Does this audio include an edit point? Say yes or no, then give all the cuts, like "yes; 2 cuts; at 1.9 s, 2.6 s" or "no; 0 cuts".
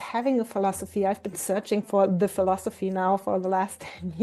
no; 0 cuts